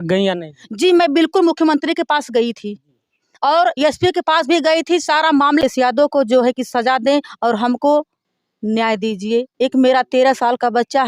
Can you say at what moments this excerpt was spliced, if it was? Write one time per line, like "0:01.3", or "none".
0:05.6

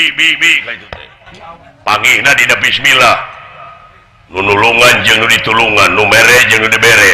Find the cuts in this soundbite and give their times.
0:01.6
0:04.3

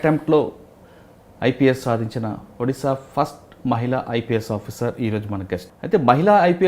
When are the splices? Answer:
0:05.7

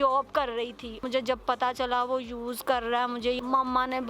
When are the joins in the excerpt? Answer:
0:01.0
0:03.4

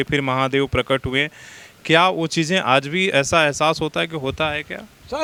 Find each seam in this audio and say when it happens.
none

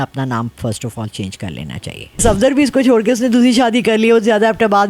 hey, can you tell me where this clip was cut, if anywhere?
0:02.2

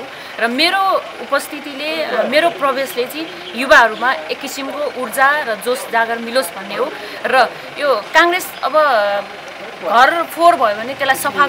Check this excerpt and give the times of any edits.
none

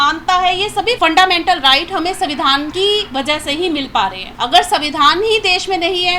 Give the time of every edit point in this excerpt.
0:01.0
0:02.7
0:04.3

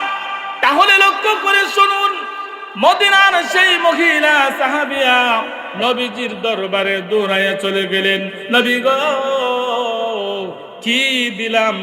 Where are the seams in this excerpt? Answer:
none

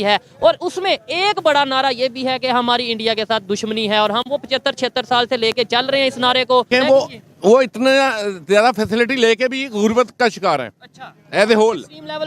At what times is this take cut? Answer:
0:06.7

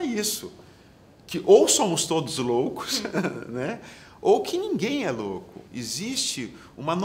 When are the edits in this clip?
0:05.6

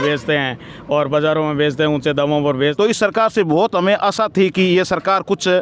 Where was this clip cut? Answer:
0:02.7

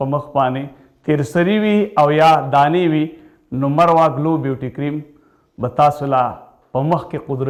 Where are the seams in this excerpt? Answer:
none

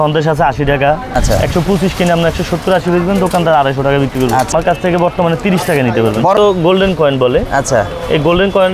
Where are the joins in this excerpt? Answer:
0:01.1
0:04.5
0:06.4

